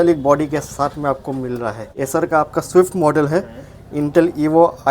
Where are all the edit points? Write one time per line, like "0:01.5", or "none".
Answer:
0:01.9